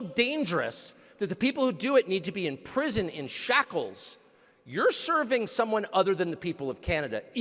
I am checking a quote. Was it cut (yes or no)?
no